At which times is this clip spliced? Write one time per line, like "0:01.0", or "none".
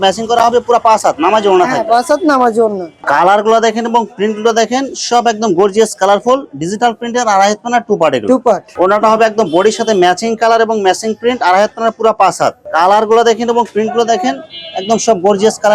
0:02.9
0:08.7
0:12.6